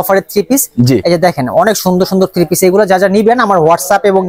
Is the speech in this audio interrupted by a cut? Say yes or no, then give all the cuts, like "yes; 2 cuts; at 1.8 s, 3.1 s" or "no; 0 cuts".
no; 0 cuts